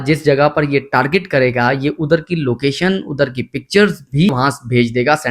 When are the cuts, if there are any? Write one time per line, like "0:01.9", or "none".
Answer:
0:04.3